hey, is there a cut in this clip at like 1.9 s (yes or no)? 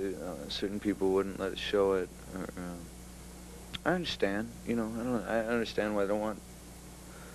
no